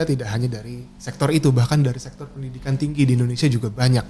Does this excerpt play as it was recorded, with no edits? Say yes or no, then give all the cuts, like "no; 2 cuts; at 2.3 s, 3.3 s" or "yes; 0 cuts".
yes; 0 cuts